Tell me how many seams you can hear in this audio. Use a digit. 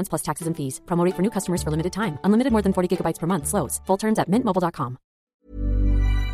1